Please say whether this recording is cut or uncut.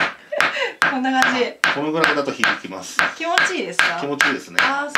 uncut